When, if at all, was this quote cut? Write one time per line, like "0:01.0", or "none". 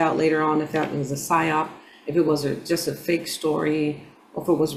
none